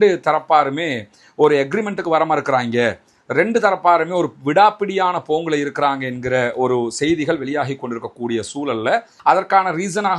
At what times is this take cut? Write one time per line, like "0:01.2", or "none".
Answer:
0:09.1